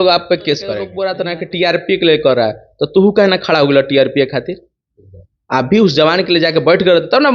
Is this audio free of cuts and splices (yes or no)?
no